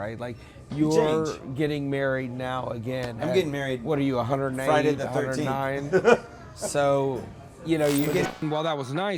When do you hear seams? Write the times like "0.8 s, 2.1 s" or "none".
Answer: 8.3 s